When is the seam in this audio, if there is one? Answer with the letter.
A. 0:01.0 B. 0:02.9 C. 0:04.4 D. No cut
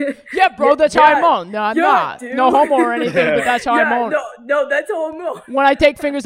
D